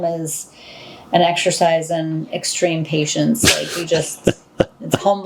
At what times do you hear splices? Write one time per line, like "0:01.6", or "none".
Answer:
none